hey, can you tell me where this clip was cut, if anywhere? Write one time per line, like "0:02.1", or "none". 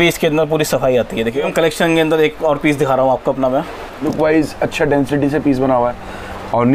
0:01.5
0:04.0